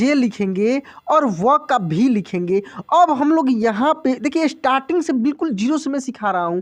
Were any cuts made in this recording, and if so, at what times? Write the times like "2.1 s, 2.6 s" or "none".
none